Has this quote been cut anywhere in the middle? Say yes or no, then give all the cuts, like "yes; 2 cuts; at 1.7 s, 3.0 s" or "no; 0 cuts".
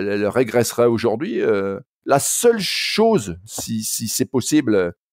yes; 1 cut; at 1.9 s